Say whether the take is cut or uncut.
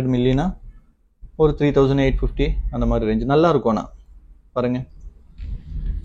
uncut